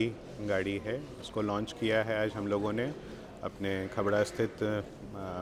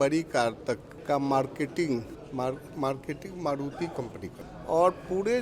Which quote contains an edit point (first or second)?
second